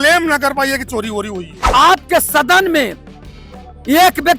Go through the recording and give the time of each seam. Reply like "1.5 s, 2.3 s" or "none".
1.7 s